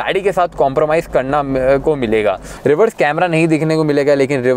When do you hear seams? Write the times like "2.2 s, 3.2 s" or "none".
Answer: 2.5 s